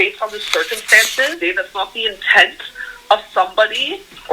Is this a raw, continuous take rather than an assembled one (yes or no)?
no